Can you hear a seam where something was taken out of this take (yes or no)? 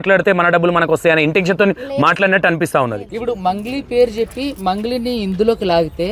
yes